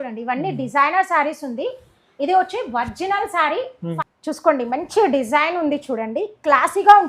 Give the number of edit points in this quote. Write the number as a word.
one